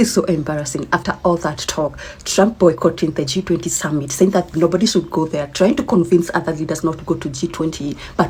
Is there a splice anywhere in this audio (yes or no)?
no